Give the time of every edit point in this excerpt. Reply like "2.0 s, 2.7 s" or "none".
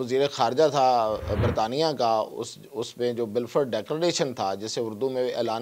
none